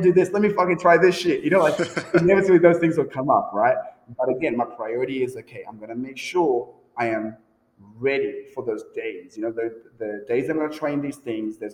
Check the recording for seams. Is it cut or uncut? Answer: uncut